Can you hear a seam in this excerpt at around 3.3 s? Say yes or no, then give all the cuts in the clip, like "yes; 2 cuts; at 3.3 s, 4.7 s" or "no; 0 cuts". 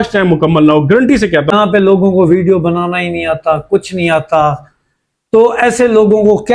no; 1 cut; at 1.5 s